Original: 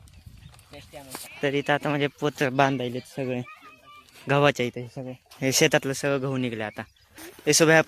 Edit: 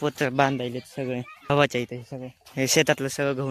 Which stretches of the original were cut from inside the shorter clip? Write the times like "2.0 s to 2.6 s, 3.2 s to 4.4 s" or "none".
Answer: 3.7 s to 4.3 s